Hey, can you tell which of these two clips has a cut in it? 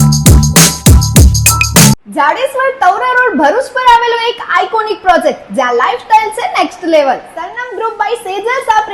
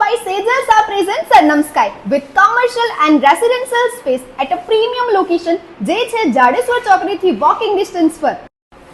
first; 1 cut; at 2.0 s

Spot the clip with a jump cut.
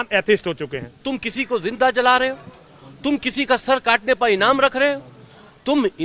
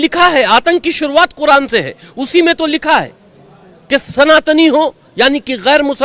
first; 1 cut; at 1.0 s

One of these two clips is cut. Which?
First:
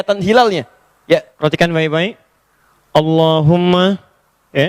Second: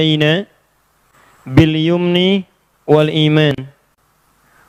first; 1 cut; at 1.3 s

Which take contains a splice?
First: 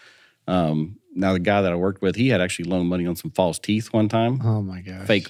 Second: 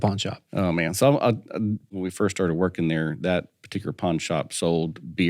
second; 1 cut; at 1.9 s

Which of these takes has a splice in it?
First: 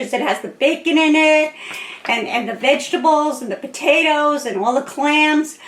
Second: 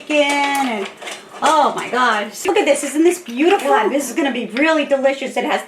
second; 2 cuts; at 2.3 s, 3.9 s

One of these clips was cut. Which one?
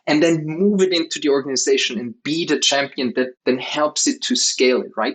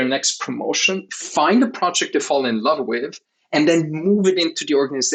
first; 1 cut; at 3.3 s

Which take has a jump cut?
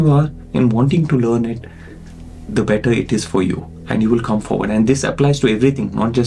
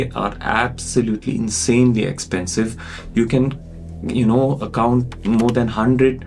first; 1 cut; at 3.8 s

